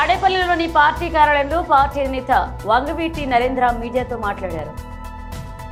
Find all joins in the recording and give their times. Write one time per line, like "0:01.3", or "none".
none